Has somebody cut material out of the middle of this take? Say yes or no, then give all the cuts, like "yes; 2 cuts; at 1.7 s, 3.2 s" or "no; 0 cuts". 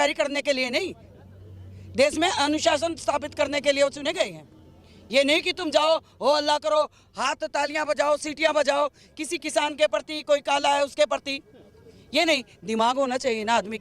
no; 0 cuts